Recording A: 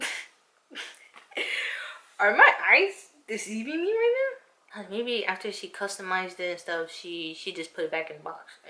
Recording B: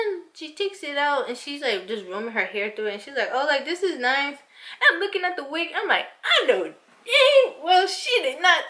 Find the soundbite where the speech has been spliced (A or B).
A